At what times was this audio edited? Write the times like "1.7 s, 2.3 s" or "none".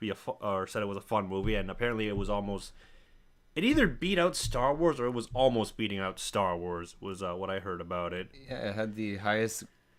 none